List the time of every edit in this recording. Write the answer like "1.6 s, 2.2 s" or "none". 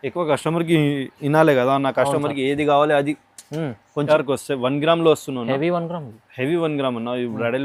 4.1 s